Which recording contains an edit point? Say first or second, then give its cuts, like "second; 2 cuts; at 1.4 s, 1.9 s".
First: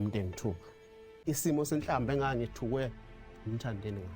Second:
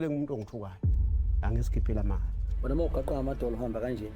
first; 1 cut; at 1.2 s